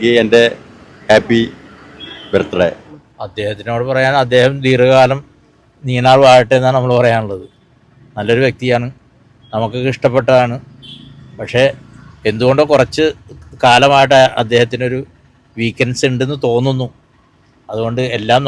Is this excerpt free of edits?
yes; 0 cuts

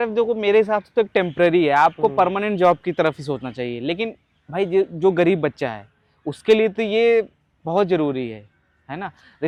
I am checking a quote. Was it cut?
no; 0 cuts

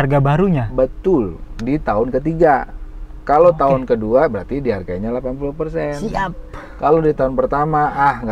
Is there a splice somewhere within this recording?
no; 0 cuts

